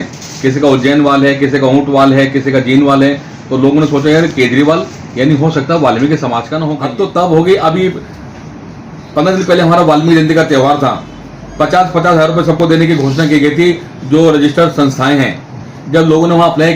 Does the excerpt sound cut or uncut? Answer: cut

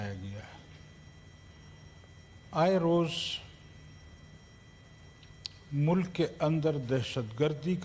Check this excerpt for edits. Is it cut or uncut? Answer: uncut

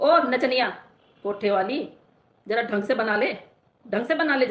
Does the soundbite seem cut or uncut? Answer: uncut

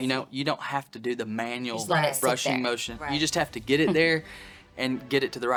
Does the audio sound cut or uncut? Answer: uncut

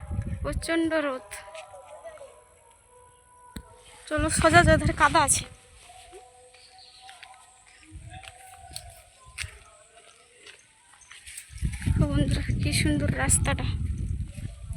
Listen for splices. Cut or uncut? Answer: cut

